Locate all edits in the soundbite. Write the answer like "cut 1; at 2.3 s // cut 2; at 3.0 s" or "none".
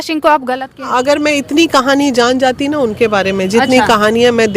cut 1; at 0.9 s